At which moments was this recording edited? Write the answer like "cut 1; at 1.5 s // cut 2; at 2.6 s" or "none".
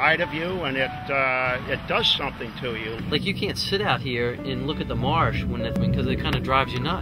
cut 1; at 3.0 s // cut 2; at 5.8 s

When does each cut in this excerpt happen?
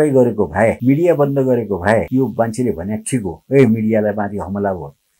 cut 1; at 0.8 s // cut 2; at 2.1 s

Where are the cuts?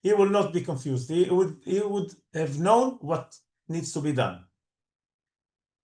none

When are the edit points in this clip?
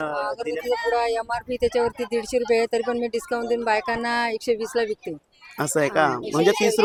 none

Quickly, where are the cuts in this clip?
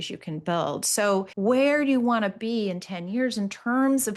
cut 1; at 1.3 s

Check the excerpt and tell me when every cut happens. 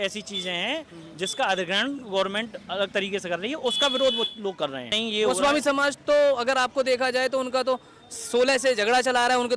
cut 1; at 5.0 s

